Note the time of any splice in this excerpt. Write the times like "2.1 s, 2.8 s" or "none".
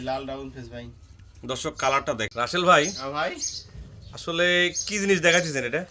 2.3 s